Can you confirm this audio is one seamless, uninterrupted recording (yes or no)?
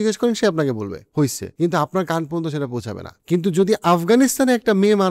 no